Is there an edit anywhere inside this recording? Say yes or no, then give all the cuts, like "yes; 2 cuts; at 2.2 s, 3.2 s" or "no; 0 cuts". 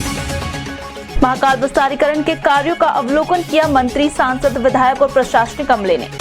no; 0 cuts